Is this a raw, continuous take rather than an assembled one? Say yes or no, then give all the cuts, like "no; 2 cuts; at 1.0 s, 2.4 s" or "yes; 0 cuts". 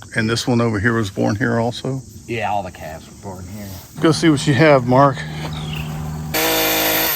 no; 1 cut; at 6.3 s